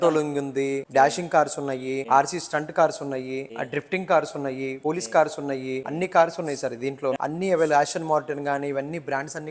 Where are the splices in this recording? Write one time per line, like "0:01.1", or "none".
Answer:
0:00.8
0:02.0
0:03.5
0:04.7
0:05.9
0:07.2